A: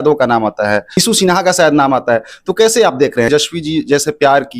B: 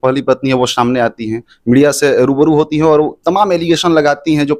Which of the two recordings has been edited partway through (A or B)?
A